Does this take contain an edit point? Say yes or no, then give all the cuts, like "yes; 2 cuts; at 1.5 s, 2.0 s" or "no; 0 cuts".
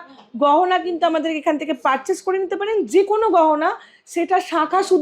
no; 0 cuts